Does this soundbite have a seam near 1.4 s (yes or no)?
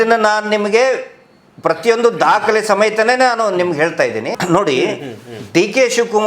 no